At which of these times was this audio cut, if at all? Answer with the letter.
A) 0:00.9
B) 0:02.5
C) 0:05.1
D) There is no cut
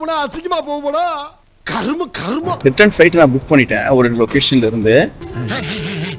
B